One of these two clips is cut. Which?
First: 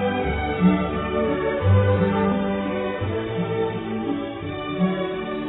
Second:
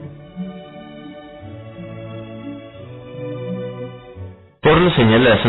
second; 1 cut; at 1.6 s

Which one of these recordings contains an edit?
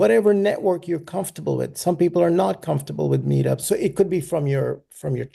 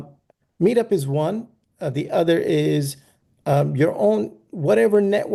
first; 1 cut; at 3.6 s

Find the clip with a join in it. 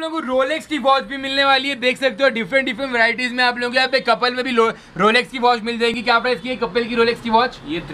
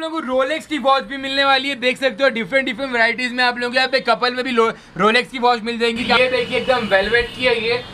second; 1 cut; at 6.0 s

